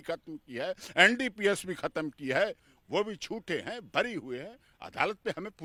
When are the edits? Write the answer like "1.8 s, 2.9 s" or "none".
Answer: none